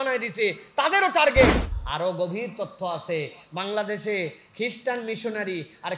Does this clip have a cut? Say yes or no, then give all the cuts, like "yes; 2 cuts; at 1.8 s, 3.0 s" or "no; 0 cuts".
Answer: yes; 1 cut; at 1.6 s